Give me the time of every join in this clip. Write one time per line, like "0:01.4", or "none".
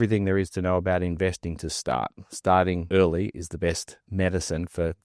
0:02.8
0:04.1

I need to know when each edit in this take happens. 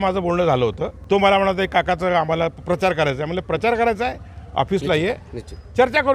0:00.9

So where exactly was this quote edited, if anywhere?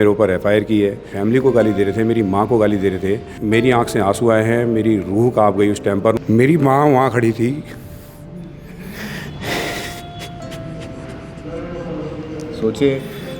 0:01.1
0:03.3
0:06.2

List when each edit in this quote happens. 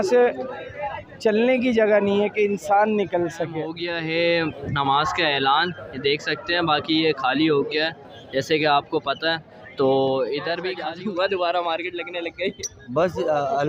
0:03.7
0:10.6

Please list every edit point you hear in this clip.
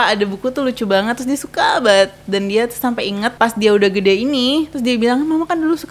0:03.3

